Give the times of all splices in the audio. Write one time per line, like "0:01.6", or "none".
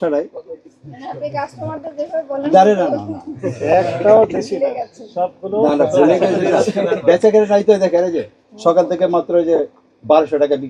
none